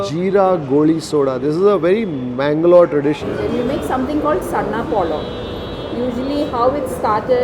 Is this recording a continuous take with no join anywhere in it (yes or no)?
no